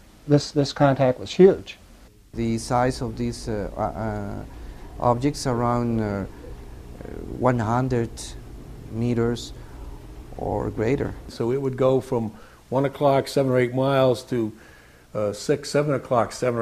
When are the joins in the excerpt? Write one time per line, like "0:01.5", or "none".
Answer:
0:02.3
0:11.2